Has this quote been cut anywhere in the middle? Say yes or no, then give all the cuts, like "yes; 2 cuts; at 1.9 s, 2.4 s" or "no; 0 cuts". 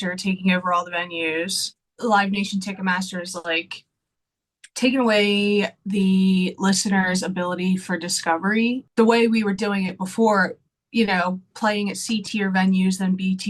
yes; 2 cuts; at 1.9 s, 8.9 s